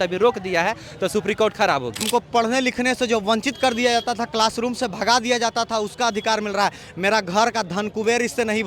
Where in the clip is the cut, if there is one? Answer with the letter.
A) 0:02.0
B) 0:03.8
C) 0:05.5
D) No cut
A